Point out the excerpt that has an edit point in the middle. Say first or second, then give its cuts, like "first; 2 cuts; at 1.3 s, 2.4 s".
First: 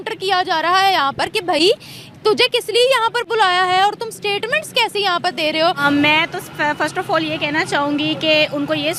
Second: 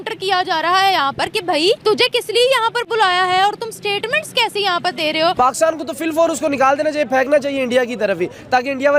second; 2 cuts; at 1.6 s, 5.3 s